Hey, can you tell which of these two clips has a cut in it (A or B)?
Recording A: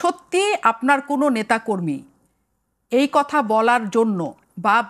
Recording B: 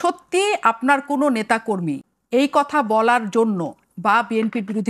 B